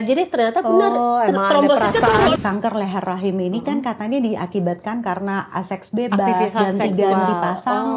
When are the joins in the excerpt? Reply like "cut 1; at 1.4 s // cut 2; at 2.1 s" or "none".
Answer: cut 1; at 2.3 s